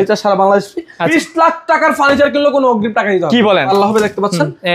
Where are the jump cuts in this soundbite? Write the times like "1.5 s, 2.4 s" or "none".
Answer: 1.1 s, 3.6 s